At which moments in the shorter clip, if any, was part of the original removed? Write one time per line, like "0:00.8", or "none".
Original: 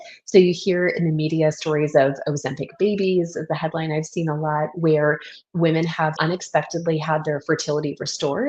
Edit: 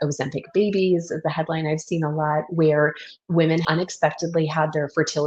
0:03.7